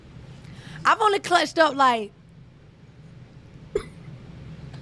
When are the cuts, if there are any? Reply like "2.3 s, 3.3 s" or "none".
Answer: none